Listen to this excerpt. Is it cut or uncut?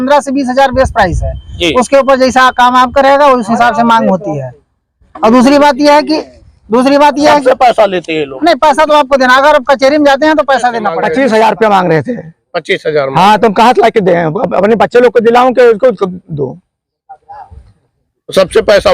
cut